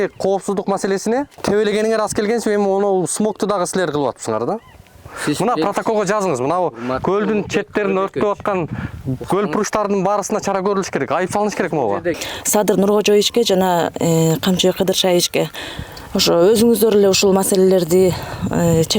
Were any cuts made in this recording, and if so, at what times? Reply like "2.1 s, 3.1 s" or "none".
1.3 s, 12.2 s